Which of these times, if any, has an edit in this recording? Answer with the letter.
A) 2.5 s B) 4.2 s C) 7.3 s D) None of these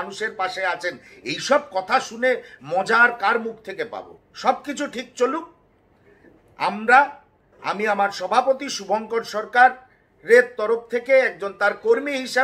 D